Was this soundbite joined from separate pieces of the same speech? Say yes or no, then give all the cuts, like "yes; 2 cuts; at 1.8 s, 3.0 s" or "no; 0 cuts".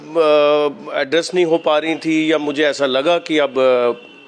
no; 0 cuts